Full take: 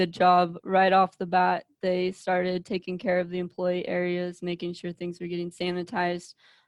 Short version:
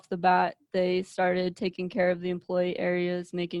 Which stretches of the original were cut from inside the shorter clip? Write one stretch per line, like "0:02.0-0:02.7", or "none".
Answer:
none